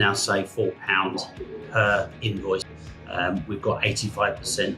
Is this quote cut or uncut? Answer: cut